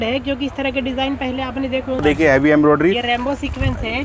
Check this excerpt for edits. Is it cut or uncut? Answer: cut